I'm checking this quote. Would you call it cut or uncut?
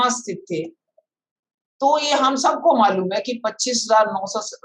uncut